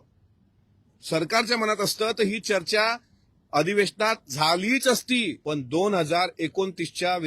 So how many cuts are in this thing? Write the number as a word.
one